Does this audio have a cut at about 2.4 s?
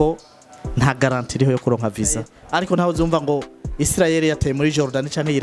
yes; 1 cut; at 2.4 s

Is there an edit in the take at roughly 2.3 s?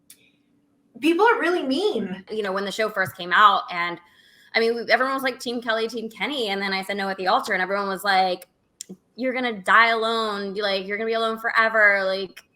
yes; 1 cut; at 2.3 s

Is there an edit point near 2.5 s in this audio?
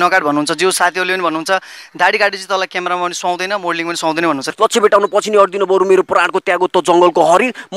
no; 1 cut; at 4.5 s

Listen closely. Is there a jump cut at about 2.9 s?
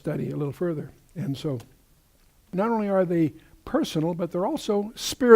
no; 1 cut; at 4.4 s

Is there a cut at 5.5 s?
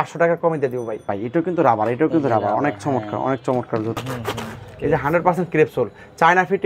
no; 2 cuts; at 1.1 s, 4.0 s

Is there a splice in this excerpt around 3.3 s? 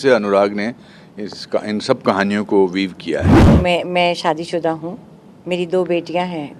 yes; 1 cut; at 3.3 s

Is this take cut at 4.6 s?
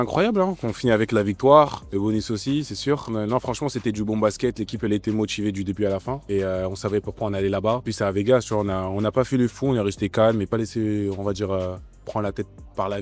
no; 5 cuts; at 1.8 s, 3.1 s, 6.2 s, 7.9 s, 10.5 s

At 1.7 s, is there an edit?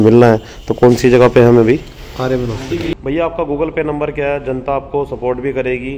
no; 1 cut; at 3.0 s

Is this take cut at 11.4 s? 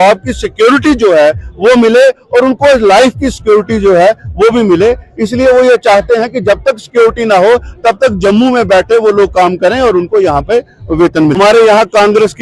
yes; 1 cut; at 11.4 s

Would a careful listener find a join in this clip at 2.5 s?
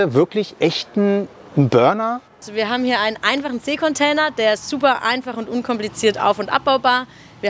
yes; 1 cut; at 2.5 s

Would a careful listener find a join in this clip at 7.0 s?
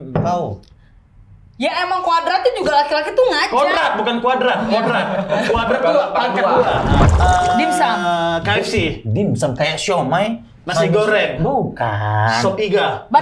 yes; 1 cut; at 7.0 s

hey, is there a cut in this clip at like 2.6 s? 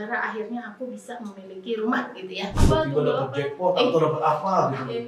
yes; 1 cut; at 2.6 s

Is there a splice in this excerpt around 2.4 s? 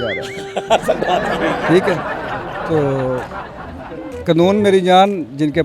no; 0 cuts

